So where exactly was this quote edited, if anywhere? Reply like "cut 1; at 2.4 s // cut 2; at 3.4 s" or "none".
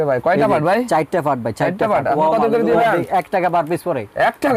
cut 1; at 2.8 s